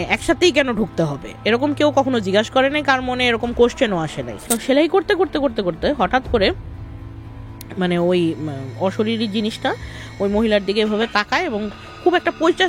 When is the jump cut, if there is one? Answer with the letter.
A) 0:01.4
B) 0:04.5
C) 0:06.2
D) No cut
B